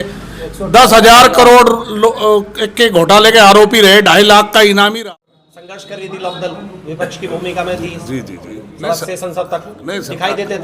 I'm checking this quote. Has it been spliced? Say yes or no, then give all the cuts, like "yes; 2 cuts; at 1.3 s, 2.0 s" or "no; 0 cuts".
yes; 1 cut; at 4.9 s